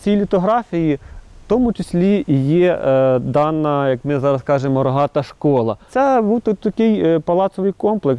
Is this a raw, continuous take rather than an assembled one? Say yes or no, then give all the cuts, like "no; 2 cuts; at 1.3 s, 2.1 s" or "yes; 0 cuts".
yes; 0 cuts